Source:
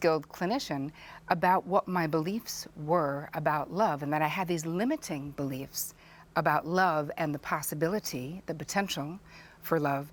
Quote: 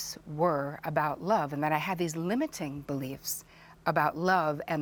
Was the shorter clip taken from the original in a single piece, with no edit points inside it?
yes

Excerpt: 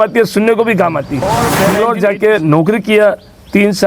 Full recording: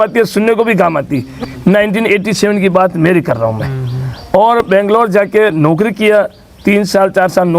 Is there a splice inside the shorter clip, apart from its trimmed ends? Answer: yes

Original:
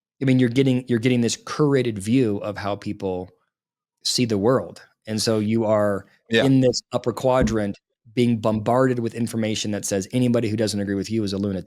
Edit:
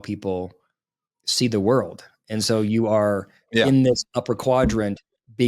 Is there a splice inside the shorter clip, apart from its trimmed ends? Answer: no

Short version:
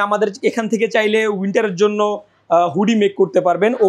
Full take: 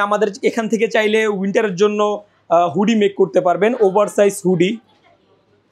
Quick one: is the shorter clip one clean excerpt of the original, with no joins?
yes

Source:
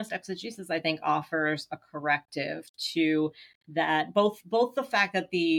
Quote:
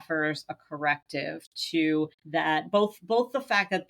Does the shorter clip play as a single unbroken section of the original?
no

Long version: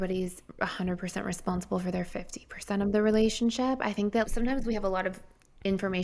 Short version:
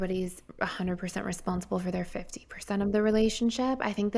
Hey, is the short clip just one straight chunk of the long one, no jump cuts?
yes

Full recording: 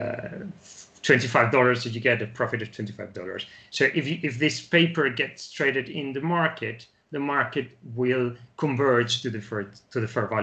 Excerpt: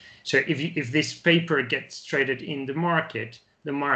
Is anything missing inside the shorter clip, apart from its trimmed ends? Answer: no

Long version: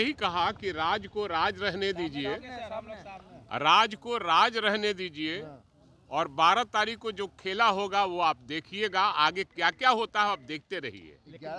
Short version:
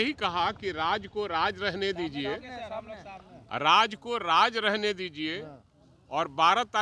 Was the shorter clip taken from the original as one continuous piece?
yes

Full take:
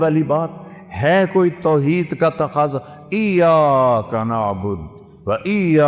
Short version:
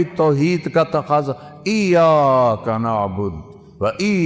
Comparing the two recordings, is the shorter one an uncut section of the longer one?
yes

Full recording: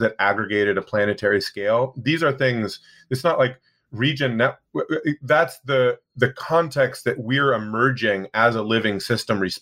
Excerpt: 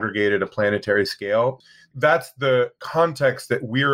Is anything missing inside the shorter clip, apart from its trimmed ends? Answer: yes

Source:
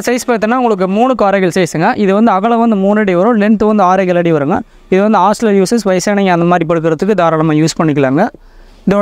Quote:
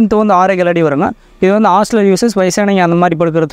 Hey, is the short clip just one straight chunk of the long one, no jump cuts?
yes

